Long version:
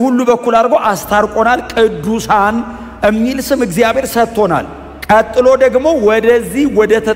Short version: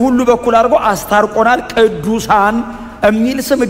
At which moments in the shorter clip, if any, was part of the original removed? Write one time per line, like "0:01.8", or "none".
none